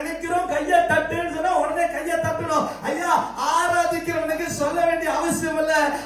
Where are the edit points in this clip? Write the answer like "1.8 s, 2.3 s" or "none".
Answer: none